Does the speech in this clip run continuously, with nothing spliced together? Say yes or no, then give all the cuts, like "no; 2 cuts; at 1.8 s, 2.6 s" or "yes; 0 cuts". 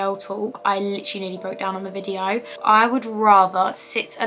no; 1 cut; at 2.5 s